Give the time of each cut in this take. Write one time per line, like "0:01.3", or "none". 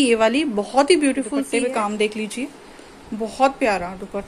0:01.4